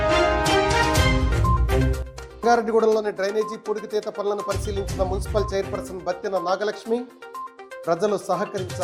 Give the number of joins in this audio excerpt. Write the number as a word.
zero